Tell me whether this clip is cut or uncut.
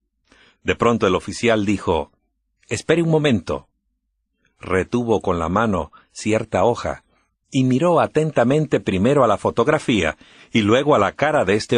cut